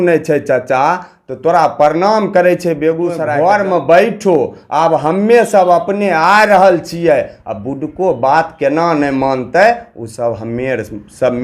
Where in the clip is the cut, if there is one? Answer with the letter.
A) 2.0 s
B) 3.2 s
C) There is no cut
B